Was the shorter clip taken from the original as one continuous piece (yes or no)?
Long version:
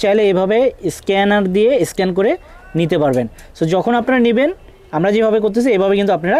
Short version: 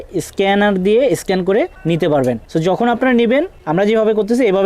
no